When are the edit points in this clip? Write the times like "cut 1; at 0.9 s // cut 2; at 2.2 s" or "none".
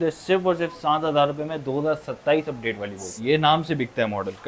cut 1; at 3.2 s